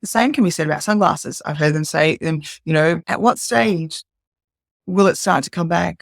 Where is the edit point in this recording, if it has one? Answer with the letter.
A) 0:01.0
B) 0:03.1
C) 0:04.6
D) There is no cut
B